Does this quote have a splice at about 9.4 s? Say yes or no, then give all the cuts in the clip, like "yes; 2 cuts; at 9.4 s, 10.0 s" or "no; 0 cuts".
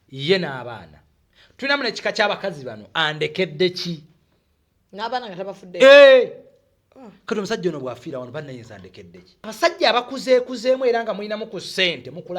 yes; 1 cut; at 9.4 s